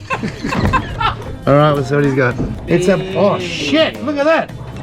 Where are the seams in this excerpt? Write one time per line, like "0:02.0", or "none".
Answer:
0:01.2
0:02.5